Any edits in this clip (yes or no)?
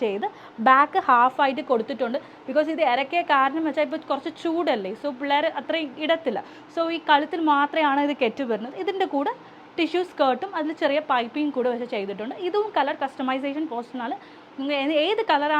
no